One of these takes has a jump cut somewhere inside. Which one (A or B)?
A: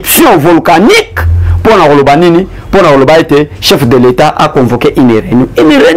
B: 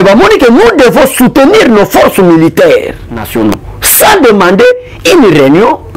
B